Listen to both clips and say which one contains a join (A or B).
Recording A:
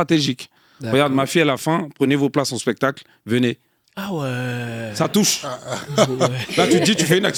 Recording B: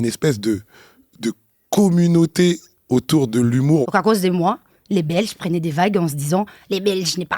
B